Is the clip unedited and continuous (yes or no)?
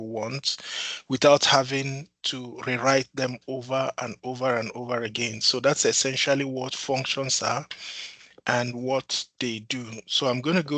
yes